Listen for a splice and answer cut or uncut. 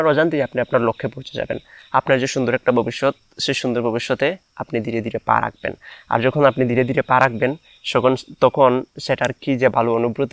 uncut